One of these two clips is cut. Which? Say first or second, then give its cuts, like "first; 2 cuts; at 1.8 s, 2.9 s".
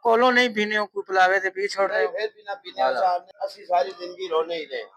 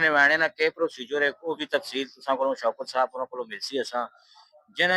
first; 1 cut; at 3.3 s